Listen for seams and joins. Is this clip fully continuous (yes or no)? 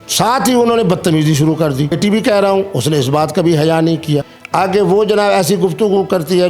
no